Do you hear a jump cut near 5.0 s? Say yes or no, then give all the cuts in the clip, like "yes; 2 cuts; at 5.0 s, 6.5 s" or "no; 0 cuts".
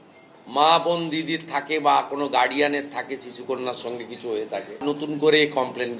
yes; 1 cut; at 5.0 s